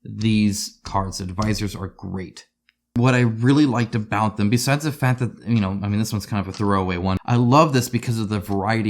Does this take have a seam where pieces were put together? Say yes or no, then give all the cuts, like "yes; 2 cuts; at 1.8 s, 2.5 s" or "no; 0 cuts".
yes; 2 cuts; at 3.0 s, 7.2 s